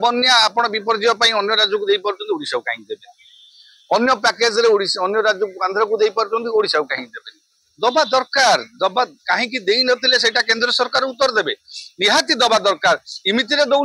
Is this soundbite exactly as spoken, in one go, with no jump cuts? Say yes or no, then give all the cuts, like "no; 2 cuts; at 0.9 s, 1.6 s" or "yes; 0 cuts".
yes; 0 cuts